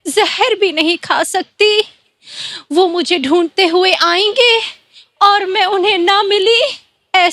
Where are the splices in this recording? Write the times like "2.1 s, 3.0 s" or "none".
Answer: none